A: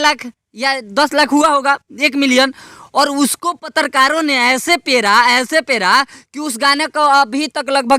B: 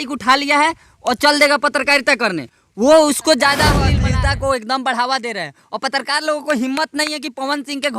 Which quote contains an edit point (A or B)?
B